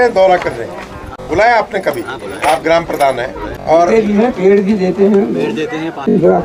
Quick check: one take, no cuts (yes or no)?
yes